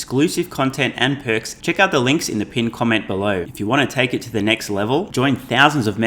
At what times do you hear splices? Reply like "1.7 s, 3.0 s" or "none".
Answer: 1.5 s, 3.5 s